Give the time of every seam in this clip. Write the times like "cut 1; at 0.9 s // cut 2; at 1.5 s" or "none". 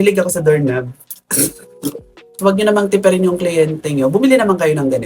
cut 1; at 2.2 s